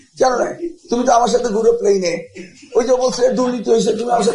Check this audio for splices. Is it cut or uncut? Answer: uncut